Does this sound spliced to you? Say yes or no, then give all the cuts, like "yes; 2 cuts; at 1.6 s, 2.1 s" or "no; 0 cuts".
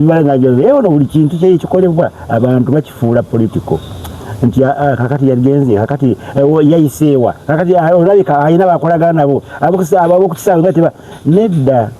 no; 0 cuts